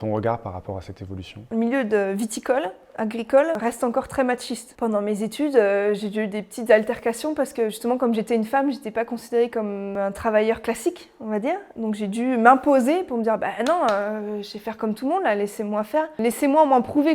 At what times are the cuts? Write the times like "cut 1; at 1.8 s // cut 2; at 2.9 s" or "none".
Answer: cut 1; at 1.5 s // cut 2; at 3.6 s // cut 3; at 4.6 s // cut 4; at 9.9 s // cut 5; at 16.2 s